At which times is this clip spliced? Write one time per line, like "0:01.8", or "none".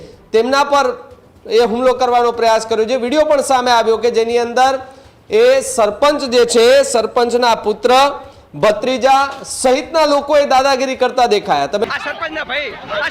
0:11.8